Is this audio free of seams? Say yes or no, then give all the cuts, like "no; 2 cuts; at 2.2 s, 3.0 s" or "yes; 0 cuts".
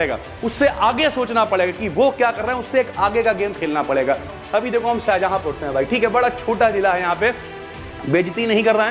no; 1 cut; at 4.4 s